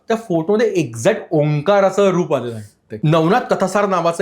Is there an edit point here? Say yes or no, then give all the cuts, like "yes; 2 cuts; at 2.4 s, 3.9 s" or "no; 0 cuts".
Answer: yes; 1 cut; at 2.9 s